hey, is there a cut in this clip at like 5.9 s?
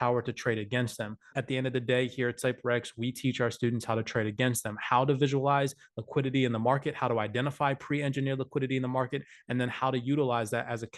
no; 1 cut; at 1.3 s

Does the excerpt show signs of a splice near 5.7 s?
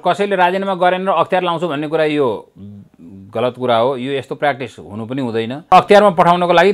yes; 1 cut; at 5.7 s

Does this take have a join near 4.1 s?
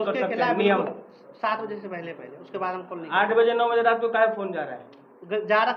no; 0 cuts

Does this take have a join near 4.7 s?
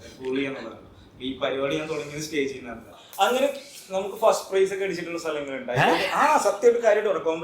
no; 1 cut; at 3.0 s

